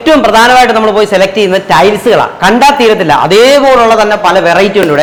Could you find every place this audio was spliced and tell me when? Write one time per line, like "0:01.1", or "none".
none